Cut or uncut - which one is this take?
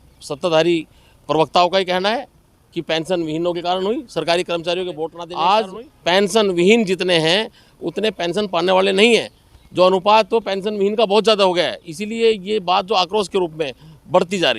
cut